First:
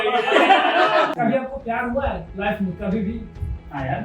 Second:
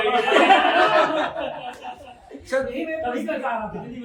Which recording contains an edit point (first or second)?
first